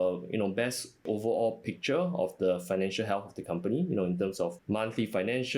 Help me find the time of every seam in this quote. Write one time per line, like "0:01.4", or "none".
0:01.0
0:04.6